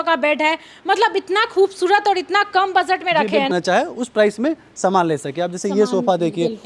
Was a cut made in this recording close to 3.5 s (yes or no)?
yes